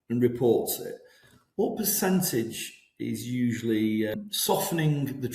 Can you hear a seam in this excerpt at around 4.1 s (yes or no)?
yes